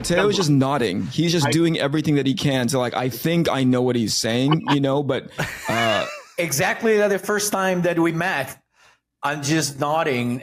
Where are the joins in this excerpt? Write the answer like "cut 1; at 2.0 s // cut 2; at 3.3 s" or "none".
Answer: none